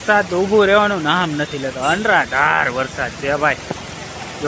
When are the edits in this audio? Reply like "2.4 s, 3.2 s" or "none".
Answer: none